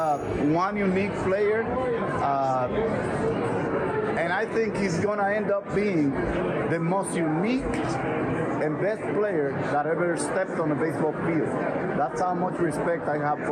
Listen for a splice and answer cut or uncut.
uncut